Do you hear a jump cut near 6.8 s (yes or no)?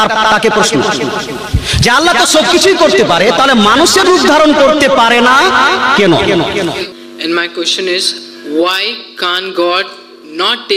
yes